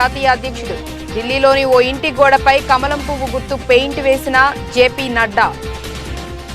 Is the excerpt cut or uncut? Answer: cut